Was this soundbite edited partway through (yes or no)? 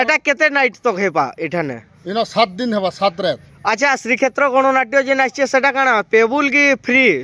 no